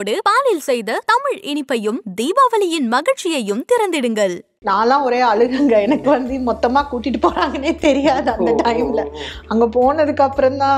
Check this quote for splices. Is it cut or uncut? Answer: cut